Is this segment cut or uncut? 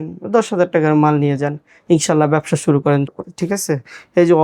cut